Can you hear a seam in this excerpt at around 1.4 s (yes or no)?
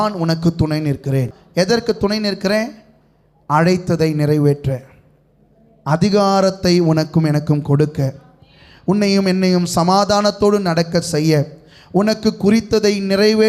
yes